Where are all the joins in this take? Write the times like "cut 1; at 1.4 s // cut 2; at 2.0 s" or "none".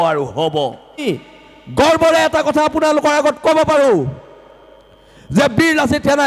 cut 1; at 1.0 s